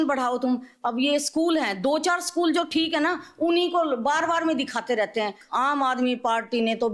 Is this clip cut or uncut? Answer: cut